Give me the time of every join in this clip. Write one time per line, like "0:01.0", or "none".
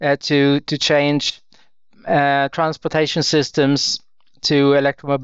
none